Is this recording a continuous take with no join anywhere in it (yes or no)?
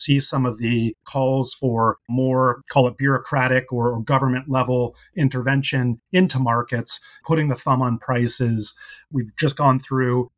no